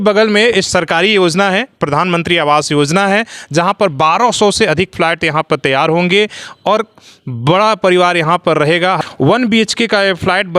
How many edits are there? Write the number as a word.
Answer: one